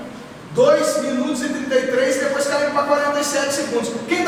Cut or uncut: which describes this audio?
uncut